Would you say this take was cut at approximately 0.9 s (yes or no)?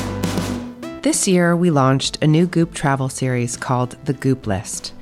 yes